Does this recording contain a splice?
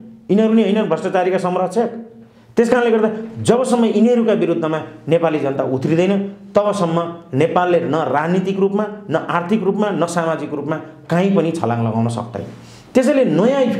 no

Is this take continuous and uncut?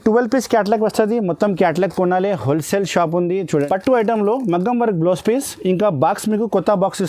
no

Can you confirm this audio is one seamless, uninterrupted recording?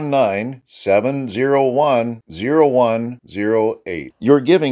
yes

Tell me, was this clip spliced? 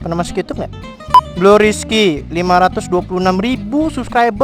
yes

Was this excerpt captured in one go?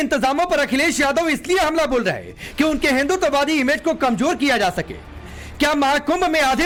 yes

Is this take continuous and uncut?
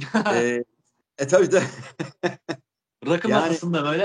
yes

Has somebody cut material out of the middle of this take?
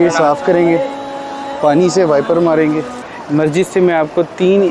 yes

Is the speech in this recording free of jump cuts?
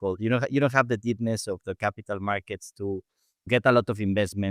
no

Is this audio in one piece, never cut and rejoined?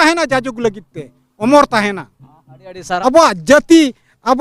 no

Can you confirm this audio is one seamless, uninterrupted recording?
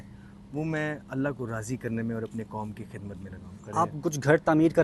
no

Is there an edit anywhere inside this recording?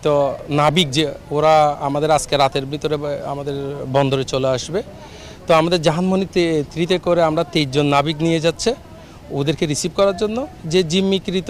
no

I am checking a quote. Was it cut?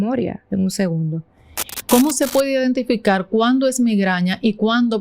yes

